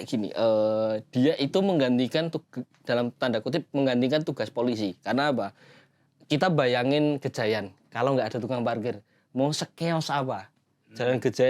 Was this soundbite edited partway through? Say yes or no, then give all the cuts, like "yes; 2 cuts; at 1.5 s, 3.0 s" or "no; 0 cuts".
no; 0 cuts